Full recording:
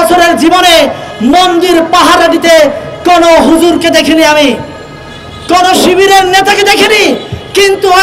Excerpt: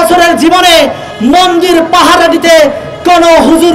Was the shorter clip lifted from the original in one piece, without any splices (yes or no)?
yes